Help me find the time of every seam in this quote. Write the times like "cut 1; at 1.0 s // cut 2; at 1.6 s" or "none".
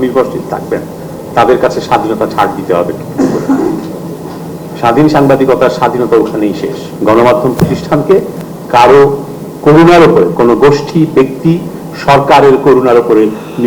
cut 1; at 6.9 s